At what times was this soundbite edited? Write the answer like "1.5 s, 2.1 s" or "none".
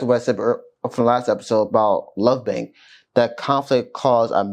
none